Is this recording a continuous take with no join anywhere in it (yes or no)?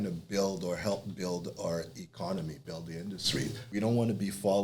no